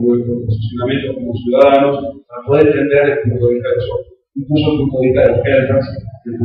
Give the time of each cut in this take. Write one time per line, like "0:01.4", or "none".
0:01.1